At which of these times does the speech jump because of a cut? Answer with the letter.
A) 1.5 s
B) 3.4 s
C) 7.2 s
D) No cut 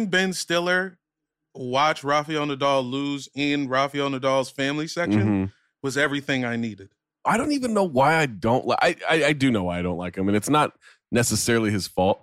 C